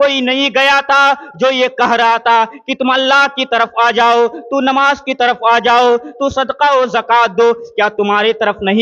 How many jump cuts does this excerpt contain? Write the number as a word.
zero